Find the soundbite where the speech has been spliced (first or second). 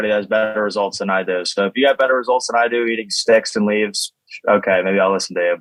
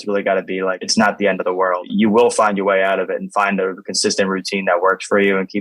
second